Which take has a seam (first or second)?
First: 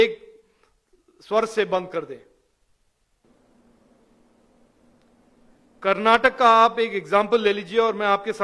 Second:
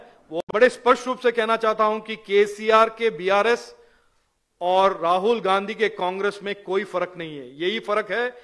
first